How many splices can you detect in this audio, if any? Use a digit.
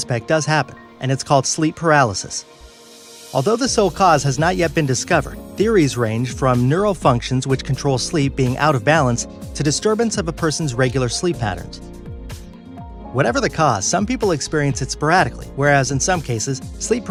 0